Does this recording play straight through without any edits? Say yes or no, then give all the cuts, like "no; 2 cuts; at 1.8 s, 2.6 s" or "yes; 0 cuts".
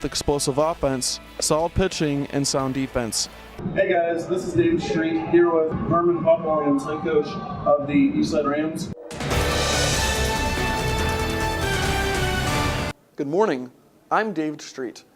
no; 2 cuts; at 3.6 s, 8.9 s